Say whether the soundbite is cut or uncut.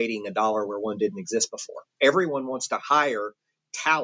cut